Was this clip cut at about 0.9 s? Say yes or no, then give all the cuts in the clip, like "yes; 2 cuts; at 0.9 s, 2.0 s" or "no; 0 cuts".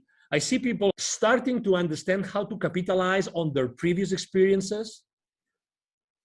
yes; 1 cut; at 0.9 s